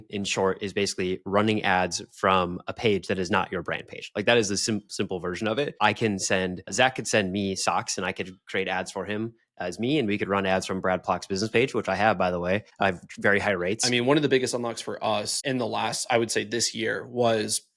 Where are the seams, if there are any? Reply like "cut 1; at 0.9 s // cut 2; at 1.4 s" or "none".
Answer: cut 1; at 13.8 s